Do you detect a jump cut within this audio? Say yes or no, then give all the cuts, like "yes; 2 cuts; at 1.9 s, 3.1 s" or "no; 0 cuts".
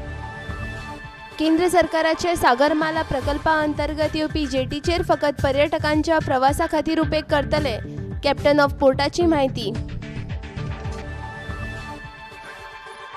no; 0 cuts